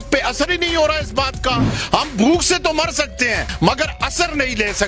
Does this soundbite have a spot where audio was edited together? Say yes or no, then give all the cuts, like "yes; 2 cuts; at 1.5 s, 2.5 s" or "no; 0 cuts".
no; 0 cuts